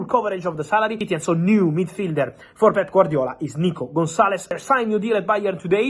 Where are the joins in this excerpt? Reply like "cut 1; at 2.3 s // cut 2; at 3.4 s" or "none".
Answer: cut 1; at 1.0 s // cut 2; at 4.6 s